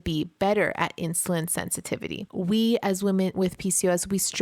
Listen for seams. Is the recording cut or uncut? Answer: cut